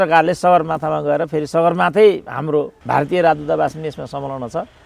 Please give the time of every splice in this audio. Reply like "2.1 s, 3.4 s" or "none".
2.8 s